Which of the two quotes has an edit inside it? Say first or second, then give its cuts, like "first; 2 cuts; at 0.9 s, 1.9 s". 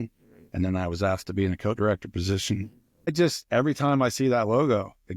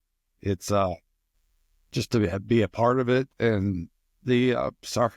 first; 1 cut; at 3.1 s